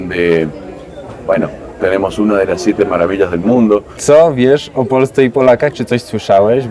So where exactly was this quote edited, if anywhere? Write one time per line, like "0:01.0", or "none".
0:03.9

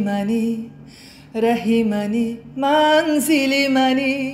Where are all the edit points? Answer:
none

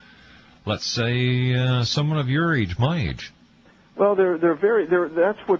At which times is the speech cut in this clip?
none

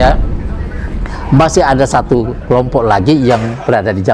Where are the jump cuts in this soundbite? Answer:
none

